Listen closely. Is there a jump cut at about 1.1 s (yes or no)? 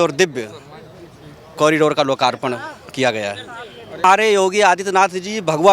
no